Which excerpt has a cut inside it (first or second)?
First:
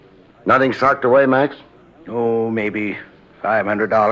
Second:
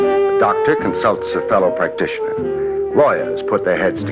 first